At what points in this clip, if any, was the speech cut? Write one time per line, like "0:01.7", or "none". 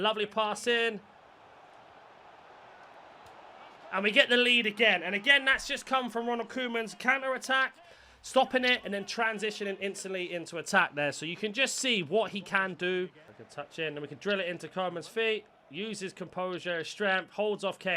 0:13.2